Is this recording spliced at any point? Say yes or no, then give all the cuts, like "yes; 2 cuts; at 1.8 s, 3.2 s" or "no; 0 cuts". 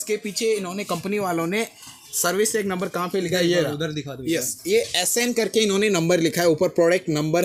no; 0 cuts